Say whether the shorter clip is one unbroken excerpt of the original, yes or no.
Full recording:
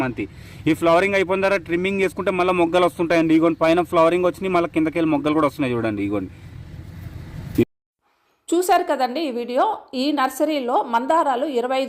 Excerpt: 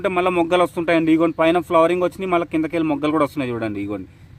yes